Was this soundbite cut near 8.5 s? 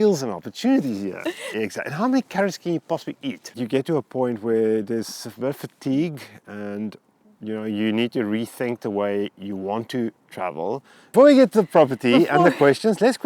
no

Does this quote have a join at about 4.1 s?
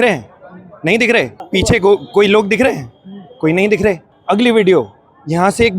yes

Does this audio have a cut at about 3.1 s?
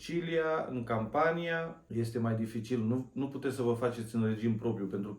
no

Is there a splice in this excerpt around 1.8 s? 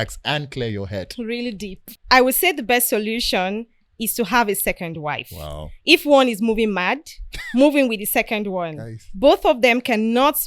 yes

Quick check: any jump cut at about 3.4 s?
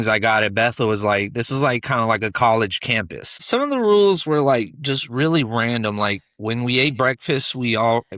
yes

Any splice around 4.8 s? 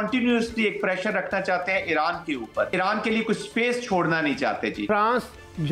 yes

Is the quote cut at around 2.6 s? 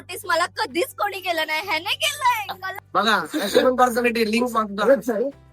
yes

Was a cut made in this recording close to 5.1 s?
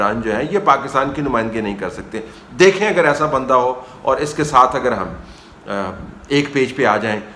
no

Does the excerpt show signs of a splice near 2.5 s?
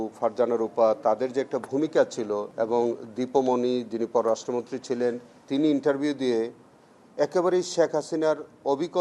yes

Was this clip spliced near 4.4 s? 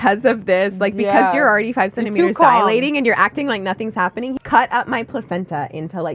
yes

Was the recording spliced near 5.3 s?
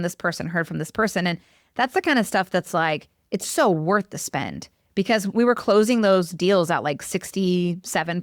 yes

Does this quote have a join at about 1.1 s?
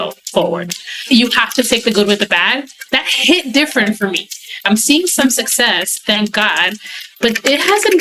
yes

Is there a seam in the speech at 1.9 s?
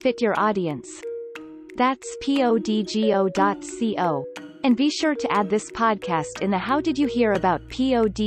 no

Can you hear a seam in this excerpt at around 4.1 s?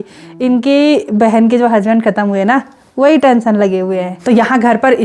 yes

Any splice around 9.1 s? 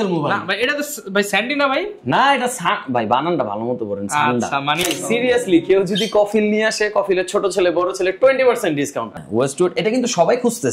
yes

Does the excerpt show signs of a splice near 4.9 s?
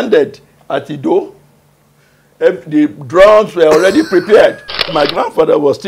yes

